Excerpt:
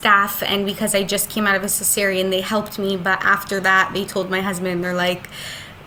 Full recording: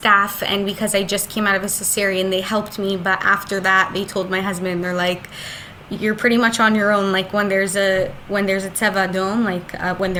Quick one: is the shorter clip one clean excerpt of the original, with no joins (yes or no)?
yes